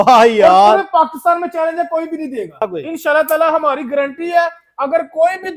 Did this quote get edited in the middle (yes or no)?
yes